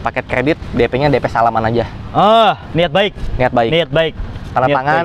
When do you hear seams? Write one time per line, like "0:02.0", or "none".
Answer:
none